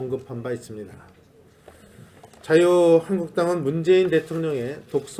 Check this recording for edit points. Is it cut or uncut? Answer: cut